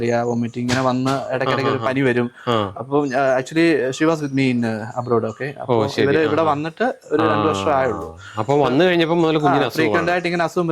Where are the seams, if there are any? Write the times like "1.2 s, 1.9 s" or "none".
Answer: none

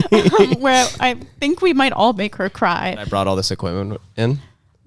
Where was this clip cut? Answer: 3.1 s

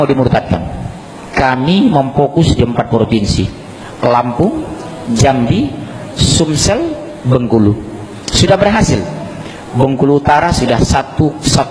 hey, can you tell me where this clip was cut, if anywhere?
none

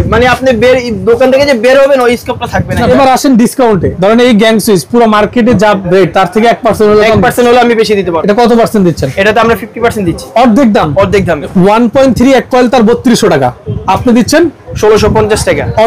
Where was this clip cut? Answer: 2.8 s, 3.9 s, 8.2 s, 11.5 s

